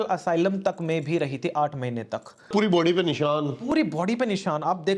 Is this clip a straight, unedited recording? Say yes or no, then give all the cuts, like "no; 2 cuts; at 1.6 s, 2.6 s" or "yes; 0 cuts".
no; 1 cut; at 2.5 s